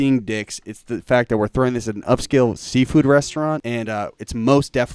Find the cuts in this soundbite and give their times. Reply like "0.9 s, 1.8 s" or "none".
3.6 s